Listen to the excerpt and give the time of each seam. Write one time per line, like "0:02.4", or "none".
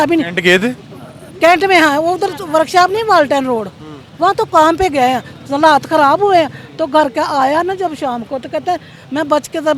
none